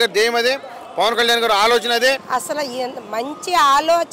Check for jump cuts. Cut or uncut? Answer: cut